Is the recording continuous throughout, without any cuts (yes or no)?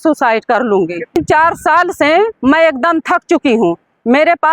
no